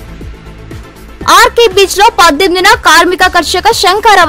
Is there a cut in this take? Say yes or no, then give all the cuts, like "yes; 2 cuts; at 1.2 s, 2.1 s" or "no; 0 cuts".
yes; 1 cut; at 1.0 s